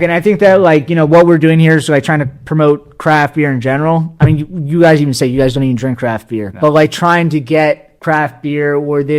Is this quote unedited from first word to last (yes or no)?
no